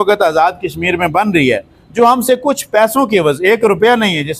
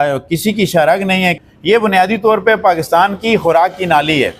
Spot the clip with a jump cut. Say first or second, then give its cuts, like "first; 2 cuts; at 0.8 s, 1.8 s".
second; 1 cut; at 1.5 s